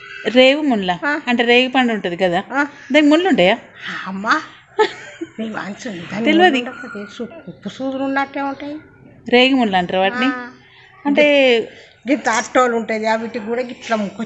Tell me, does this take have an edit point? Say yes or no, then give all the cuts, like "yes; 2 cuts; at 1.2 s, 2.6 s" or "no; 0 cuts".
no; 0 cuts